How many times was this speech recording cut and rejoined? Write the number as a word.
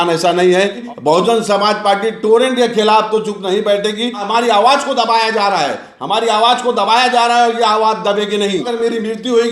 three